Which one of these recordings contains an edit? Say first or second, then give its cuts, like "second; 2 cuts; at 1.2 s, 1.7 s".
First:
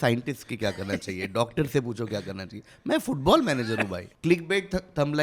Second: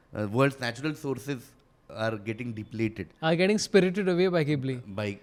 first; 1 cut; at 4.0 s